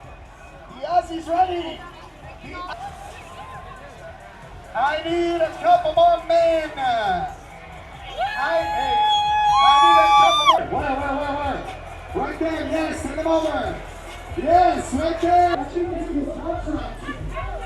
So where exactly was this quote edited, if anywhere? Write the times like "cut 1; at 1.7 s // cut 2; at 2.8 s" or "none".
cut 1; at 2.7 s // cut 2; at 10.6 s // cut 3; at 15.6 s